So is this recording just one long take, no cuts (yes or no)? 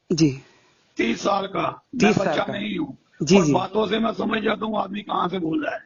yes